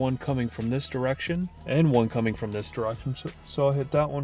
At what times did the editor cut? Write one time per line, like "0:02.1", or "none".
0:01.6